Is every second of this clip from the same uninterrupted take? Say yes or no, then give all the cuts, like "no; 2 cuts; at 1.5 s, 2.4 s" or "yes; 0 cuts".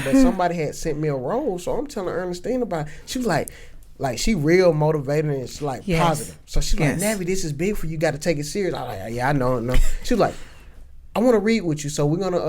yes; 0 cuts